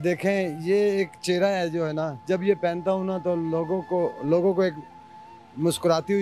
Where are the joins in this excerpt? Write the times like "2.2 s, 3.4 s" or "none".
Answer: none

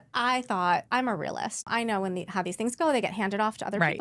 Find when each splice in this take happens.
1.7 s

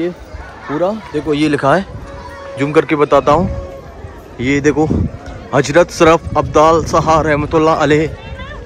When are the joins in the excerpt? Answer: none

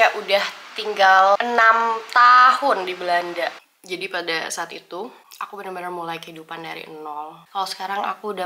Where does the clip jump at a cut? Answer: 1.4 s, 3.6 s, 7.4 s

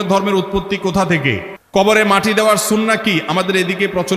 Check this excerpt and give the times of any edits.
1.5 s

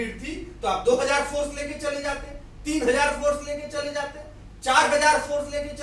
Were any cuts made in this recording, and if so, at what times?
none

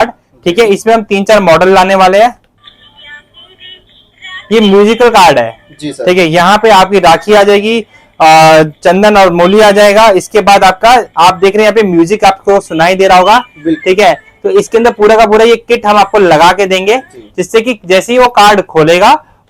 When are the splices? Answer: none

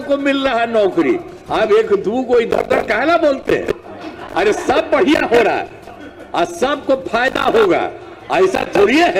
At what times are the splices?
1.3 s

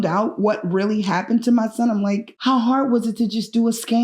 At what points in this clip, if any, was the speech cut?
2.3 s

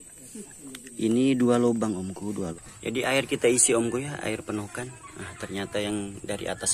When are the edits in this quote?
2.6 s

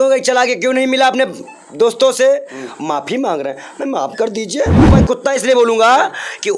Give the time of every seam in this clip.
4.9 s

